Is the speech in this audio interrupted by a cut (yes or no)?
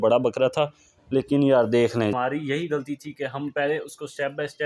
yes